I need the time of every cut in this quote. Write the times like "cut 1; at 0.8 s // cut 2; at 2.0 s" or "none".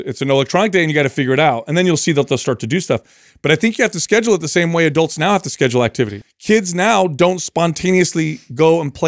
cut 1; at 6.3 s